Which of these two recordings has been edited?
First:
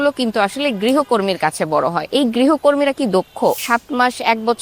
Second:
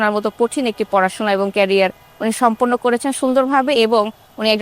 first; 2 cuts; at 2.0 s, 3.6 s

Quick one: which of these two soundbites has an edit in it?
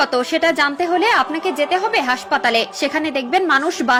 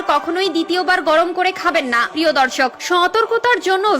second; 1 cut; at 2.1 s

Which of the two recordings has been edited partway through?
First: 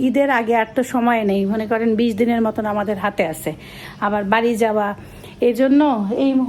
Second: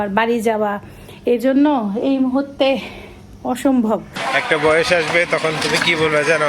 second; 1 cut; at 4.1 s

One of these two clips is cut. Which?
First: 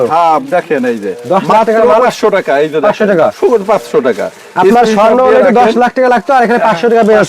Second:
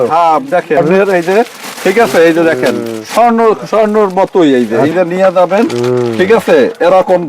second; 2 cuts; at 0.8 s, 4.9 s

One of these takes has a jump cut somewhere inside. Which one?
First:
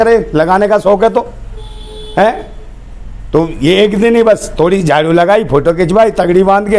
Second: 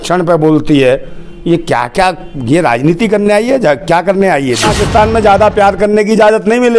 second; 1 cut; at 4.7 s

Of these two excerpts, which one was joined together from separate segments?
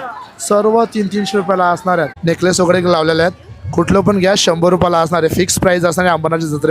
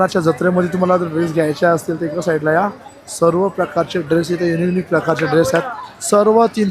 first; 1 cut; at 2.1 s

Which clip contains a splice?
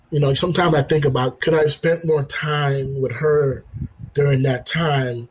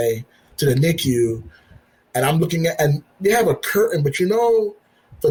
first; 1 cut; at 1.3 s

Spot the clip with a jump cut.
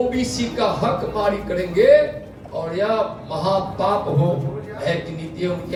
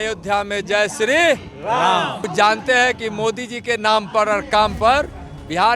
second; 1 cut; at 2.3 s

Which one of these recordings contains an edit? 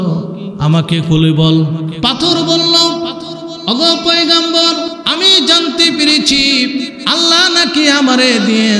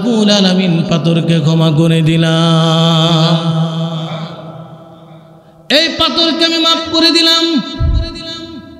first; 4 cuts; at 1.9 s, 3.5 s, 5.0 s, 7.0 s

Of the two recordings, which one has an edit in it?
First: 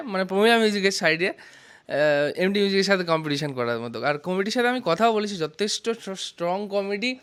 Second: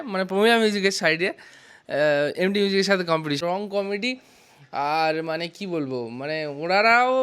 second; 1 cut; at 3.4 s

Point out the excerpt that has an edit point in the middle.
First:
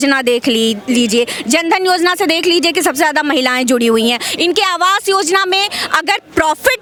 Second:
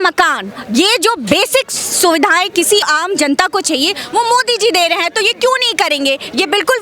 second; 1 cut; at 2.9 s

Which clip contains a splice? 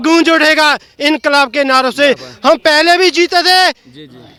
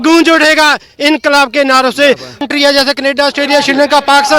second; 1 cut; at 2.4 s

